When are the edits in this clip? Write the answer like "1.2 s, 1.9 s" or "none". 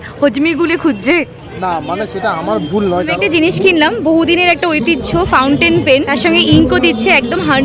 3.2 s, 6.1 s